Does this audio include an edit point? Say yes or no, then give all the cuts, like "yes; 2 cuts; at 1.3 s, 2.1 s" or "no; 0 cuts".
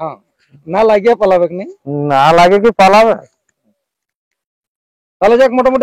no; 0 cuts